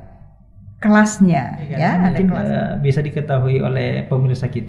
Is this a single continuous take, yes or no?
no